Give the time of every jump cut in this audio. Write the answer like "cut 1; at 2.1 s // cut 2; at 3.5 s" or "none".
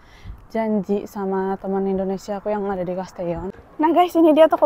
cut 1; at 3.5 s